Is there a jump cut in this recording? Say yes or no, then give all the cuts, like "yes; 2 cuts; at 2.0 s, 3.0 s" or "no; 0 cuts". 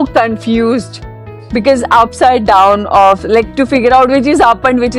no; 0 cuts